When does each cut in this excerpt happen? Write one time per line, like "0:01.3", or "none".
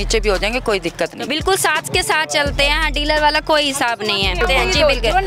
0:01.2
0:04.4